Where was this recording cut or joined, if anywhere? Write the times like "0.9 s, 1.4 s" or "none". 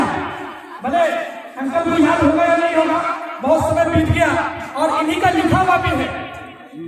none